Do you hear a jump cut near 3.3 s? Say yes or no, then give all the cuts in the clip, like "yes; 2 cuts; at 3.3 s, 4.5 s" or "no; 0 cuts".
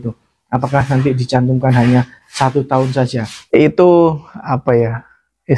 yes; 1 cut; at 3.3 s